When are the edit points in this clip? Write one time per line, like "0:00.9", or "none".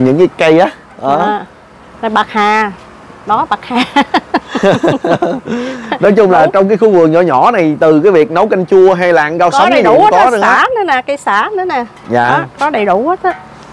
none